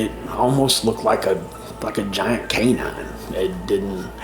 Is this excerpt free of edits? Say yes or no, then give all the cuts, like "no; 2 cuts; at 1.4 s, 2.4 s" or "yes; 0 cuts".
yes; 0 cuts